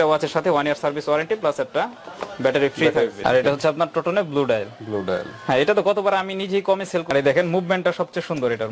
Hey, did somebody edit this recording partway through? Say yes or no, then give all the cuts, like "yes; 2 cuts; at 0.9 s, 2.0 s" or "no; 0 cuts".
yes; 2 cuts; at 3.2 s, 7.1 s